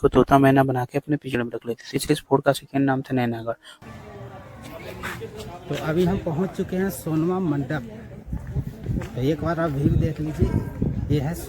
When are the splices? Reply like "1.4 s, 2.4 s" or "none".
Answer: none